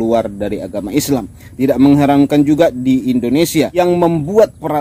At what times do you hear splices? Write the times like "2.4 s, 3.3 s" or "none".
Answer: 1.4 s, 3.8 s